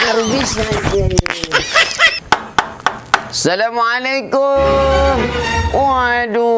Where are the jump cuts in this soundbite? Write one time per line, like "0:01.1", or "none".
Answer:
0:02.2